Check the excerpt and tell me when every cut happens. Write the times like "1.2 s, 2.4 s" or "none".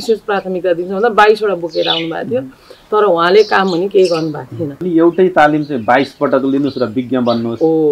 4.8 s